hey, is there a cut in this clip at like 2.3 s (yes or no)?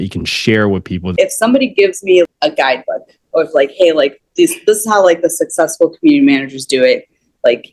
yes